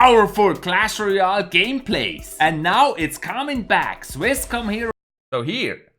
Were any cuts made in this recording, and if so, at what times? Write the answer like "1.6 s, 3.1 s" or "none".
none